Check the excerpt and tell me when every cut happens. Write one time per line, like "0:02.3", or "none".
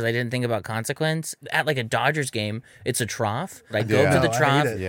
0:01.4
0:03.7